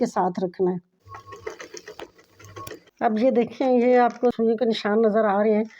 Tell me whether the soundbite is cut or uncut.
cut